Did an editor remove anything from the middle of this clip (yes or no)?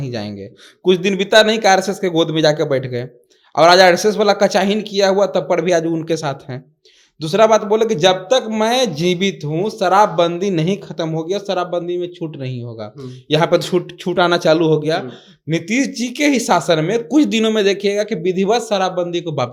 no